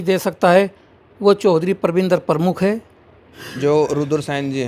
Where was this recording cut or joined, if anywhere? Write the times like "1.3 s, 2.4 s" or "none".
3.5 s